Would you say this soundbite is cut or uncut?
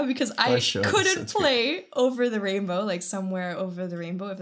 uncut